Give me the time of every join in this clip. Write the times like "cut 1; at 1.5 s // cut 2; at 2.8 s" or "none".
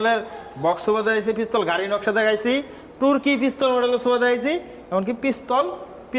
none